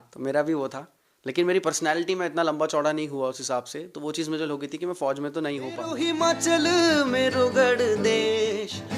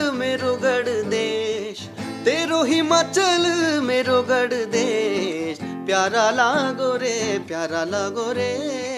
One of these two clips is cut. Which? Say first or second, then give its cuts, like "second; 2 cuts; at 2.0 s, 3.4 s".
first; 1 cut; at 5.9 s